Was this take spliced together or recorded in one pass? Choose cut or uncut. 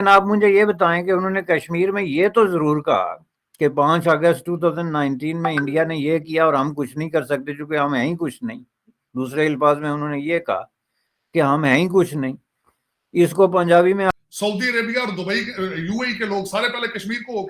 cut